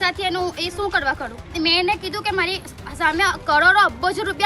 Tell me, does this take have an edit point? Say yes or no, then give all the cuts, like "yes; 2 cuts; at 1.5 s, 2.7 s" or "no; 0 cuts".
yes; 1 cut; at 1.5 s